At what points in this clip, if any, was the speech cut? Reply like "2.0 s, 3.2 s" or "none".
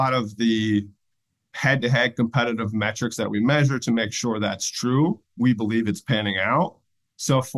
5.3 s

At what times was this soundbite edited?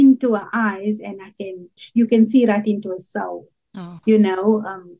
1.8 s

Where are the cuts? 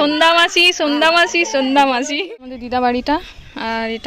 2.1 s

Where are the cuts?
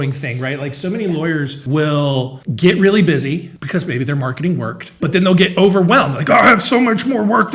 1.6 s, 2.4 s, 3.5 s, 4.8 s

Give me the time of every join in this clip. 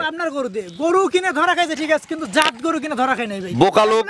none

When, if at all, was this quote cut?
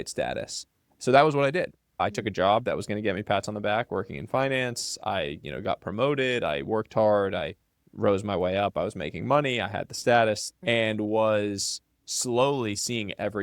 2.0 s, 10.5 s

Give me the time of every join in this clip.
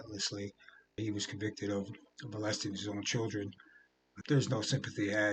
1.0 s, 4.1 s

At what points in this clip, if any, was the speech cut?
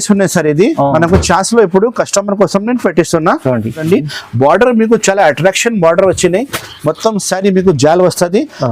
3.9 s

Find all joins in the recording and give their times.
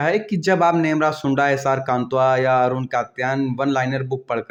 none

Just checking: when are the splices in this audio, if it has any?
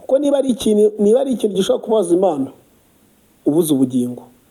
none

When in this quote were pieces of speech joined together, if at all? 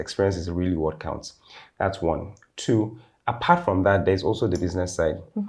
none

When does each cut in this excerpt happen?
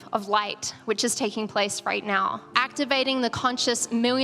2.5 s

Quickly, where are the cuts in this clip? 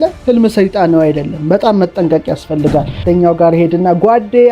3.0 s

